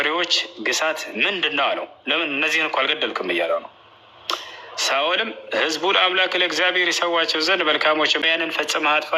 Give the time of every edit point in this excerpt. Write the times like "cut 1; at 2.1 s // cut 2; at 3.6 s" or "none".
cut 1; at 8.2 s